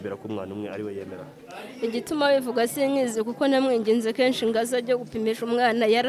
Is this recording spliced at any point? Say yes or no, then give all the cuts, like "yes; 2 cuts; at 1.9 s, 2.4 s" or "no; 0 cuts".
no; 0 cuts